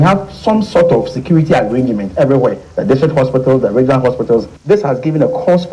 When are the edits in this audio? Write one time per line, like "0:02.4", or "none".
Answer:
none

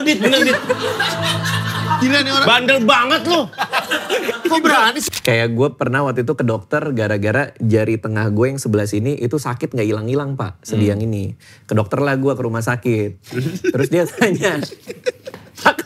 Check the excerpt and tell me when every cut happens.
0:05.0

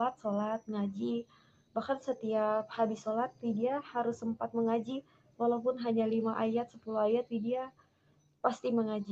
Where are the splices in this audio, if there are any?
none

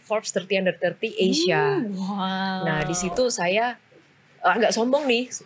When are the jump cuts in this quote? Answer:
none

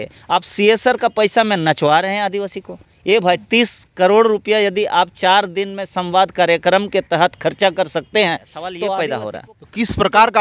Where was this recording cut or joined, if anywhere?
0:08.9

